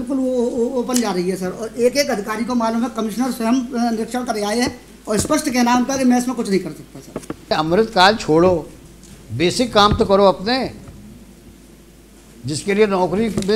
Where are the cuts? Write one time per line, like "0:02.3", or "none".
0:07.5